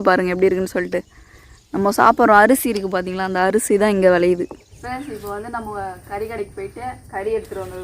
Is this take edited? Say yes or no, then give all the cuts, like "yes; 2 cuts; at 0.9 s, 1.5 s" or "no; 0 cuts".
yes; 1 cut; at 4.8 s